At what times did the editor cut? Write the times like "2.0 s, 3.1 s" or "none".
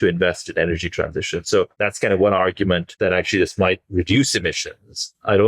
1.7 s, 2.9 s

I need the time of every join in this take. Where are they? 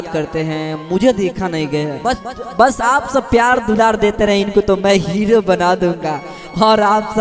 2.0 s

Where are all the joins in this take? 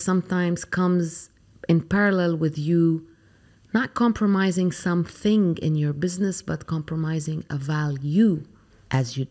none

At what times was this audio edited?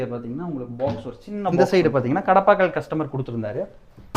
1.6 s

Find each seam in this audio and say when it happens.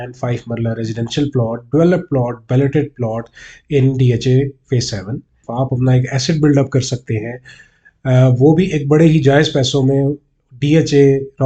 5.4 s

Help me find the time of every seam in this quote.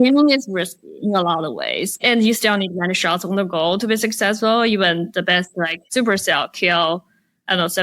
5.8 s

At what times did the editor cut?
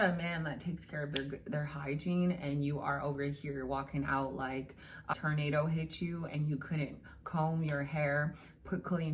5.1 s

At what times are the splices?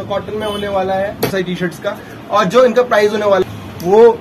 1.3 s, 3.4 s

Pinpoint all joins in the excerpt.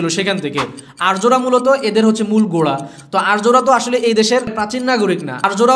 4.8 s

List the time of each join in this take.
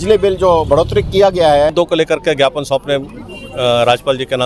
1.7 s

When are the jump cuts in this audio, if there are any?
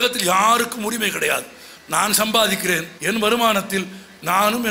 2.9 s

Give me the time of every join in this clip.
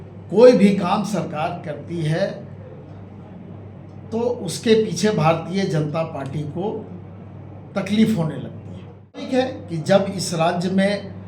9.3 s

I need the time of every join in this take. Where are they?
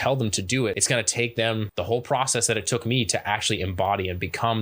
0.8 s, 1.7 s

